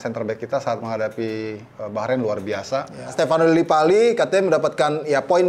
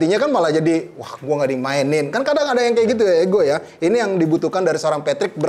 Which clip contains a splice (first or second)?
first